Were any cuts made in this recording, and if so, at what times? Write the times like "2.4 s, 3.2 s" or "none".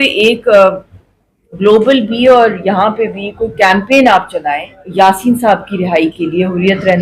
4.8 s